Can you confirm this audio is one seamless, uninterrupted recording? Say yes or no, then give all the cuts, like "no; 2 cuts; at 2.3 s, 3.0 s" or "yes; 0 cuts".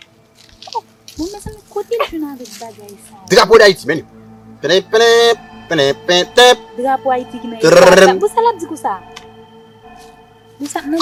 yes; 0 cuts